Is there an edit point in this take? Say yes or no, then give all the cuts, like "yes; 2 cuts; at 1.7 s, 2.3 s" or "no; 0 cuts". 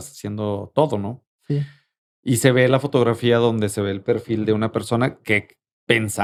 no; 0 cuts